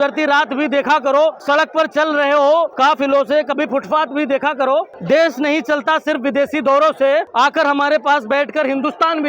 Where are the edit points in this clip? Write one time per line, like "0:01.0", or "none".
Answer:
0:01.4
0:02.7
0:05.0
0:07.3